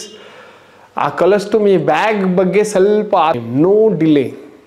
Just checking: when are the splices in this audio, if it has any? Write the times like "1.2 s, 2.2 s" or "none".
3.4 s